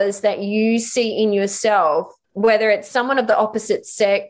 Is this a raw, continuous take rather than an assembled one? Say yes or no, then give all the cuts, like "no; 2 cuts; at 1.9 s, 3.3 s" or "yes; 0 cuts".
no; 1 cut; at 2.2 s